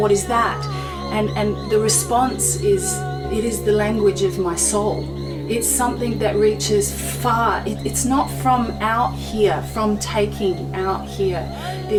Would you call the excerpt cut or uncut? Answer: uncut